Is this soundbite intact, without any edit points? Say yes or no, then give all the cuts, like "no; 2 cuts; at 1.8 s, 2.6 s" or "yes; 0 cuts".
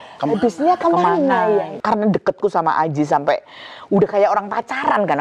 no; 1 cut; at 1.7 s